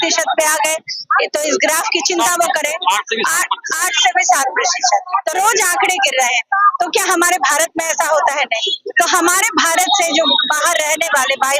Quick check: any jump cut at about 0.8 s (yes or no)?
no